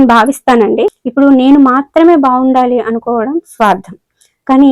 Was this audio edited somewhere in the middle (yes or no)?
yes